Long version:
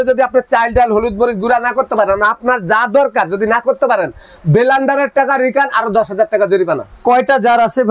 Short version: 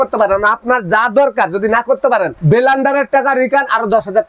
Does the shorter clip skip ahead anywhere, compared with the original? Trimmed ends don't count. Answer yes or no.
yes